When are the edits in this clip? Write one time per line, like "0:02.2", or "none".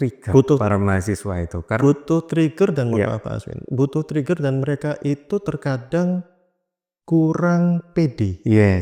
none